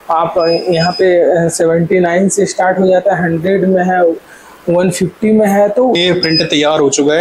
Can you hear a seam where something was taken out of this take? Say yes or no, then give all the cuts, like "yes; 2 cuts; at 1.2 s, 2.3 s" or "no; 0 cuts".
yes; 1 cut; at 6.0 s